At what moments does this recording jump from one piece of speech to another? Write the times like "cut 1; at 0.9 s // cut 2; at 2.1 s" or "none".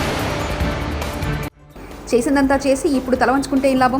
cut 1; at 1.6 s